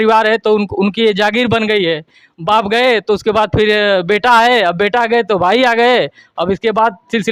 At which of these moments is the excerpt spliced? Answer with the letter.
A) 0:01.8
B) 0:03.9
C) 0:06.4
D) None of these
D